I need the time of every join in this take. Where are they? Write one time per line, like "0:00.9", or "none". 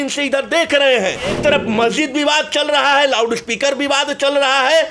0:01.4